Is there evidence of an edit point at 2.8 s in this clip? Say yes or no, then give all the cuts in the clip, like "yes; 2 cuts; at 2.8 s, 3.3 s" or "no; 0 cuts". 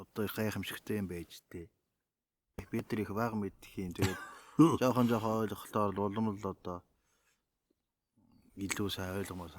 yes; 1 cut; at 2.8 s